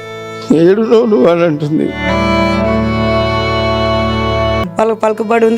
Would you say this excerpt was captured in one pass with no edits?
no; 1 cut; at 4.7 s

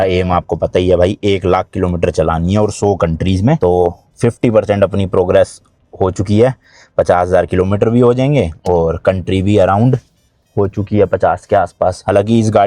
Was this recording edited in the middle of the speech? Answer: no; 0 cuts

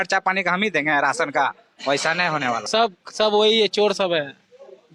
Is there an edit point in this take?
yes; 1 cut; at 2.6 s

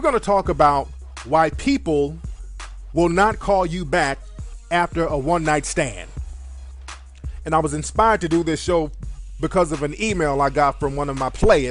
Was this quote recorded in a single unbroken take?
yes; 0 cuts

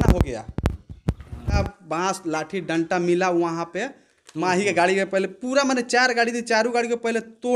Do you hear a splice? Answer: yes; 1 cut; at 1.6 s

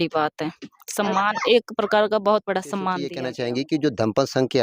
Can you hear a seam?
yes; 1 cut; at 3.2 s

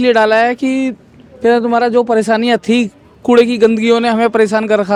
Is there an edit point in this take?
no; 0 cuts

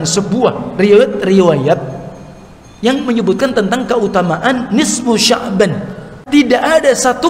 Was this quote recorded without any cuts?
no; 1 cut; at 6.2 s

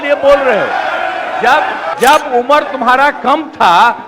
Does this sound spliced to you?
yes; 1 cut; at 1.8 s

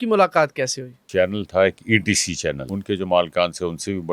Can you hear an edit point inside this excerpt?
yes; 2 cuts; at 1.1 s, 2.7 s

